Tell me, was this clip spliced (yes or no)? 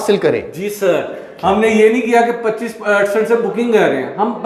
no